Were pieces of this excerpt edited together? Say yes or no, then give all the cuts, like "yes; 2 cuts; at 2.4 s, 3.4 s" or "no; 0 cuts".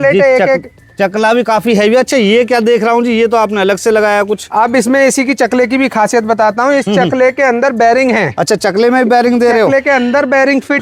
no; 0 cuts